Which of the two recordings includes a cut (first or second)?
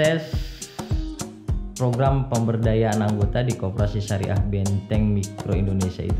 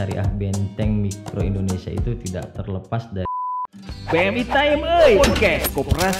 second